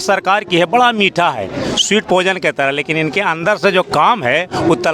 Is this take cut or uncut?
uncut